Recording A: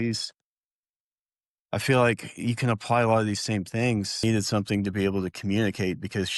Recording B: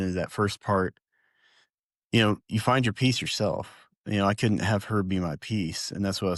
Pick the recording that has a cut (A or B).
A